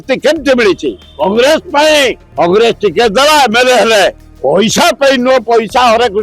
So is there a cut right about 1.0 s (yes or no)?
no